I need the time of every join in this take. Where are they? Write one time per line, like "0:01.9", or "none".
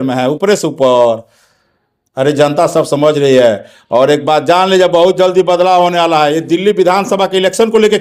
none